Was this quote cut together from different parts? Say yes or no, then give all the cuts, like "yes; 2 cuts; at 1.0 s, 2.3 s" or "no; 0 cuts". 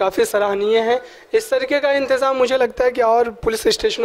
no; 0 cuts